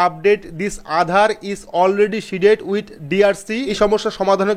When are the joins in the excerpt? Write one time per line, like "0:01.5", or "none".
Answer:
0:03.7

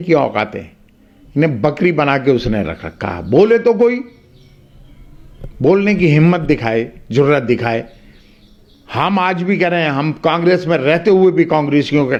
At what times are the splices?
none

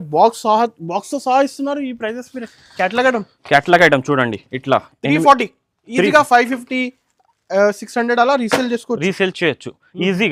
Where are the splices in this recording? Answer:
none

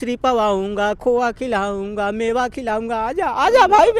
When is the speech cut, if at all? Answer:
none

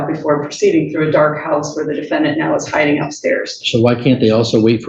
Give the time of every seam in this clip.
none

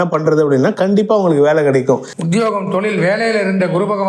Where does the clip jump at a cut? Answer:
0:02.1

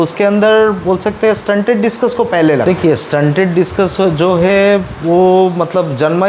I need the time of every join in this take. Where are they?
0:02.6

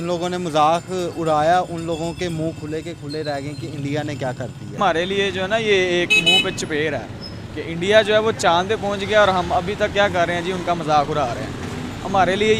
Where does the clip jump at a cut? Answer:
0:04.7

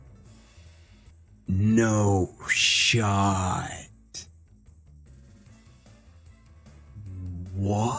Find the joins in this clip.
0:01.1

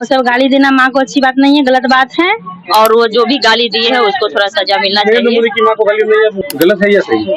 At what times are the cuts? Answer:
0:02.5
0:06.4

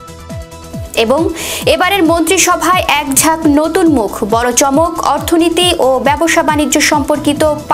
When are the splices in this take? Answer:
0:00.9

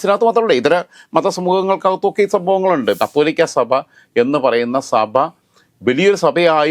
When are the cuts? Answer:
0:03.0

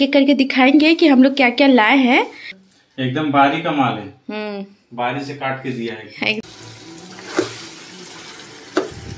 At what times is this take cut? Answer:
0:02.5
0:06.4

